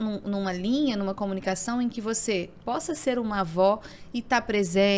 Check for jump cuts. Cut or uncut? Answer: uncut